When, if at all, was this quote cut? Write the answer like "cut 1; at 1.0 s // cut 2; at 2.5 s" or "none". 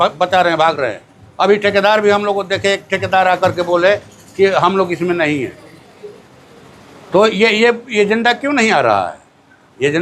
none